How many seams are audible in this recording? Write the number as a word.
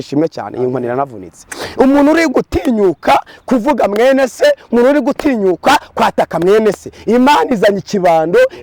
zero